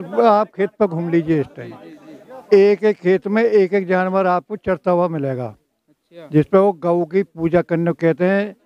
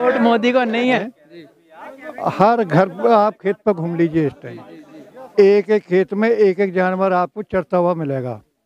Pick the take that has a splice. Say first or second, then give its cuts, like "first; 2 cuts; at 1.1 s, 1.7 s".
second; 1 cut; at 1.0 s